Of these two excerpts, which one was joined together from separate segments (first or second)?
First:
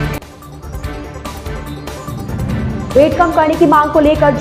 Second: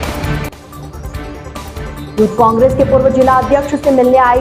second